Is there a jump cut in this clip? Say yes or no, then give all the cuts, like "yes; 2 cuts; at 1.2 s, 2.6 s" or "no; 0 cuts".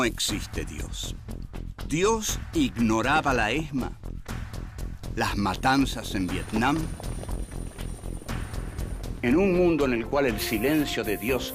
yes; 1 cut; at 9.0 s